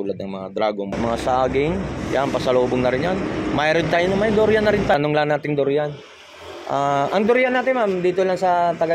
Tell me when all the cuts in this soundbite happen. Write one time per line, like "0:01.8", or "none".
0:01.0
0:04.9